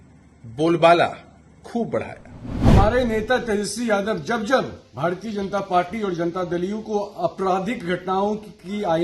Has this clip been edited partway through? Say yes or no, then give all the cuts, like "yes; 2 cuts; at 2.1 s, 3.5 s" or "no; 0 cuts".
yes; 1 cut; at 2.5 s